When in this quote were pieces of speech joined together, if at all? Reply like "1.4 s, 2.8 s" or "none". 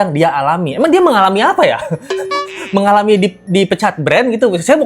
none

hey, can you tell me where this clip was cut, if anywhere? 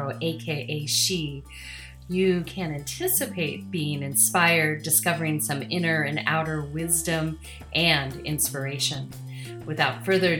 none

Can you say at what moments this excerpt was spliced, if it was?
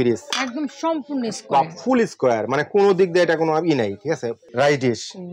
4.4 s

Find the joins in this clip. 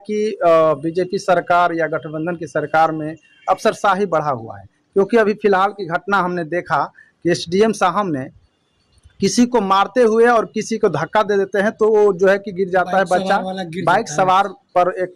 none

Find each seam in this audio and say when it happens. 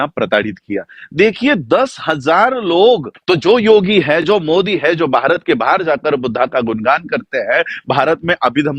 3.1 s

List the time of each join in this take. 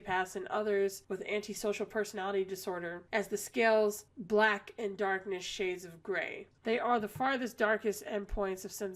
6.4 s

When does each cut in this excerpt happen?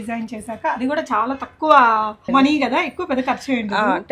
2.2 s

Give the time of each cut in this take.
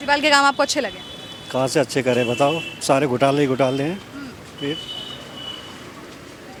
none

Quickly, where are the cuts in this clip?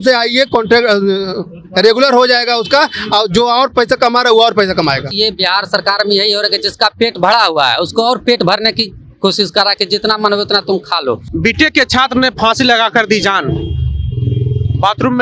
5.1 s, 11.2 s

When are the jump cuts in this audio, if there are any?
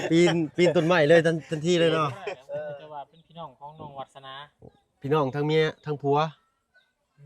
2.6 s

